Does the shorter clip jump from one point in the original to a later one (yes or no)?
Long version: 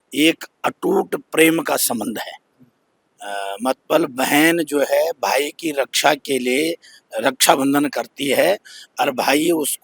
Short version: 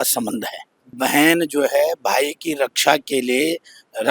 yes